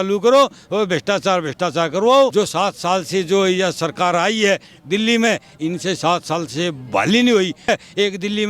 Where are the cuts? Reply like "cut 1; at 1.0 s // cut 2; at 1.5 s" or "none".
cut 1; at 2.3 s // cut 2; at 7.7 s